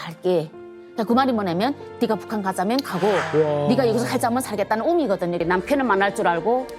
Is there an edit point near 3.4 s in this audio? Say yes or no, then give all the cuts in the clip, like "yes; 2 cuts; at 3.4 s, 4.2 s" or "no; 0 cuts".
no; 1 cut; at 5.4 s